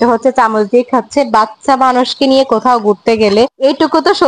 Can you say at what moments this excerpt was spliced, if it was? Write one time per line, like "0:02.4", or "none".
none